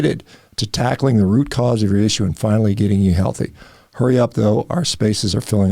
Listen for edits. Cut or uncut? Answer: uncut